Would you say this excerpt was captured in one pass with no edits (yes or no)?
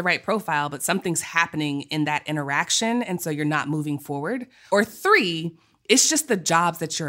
no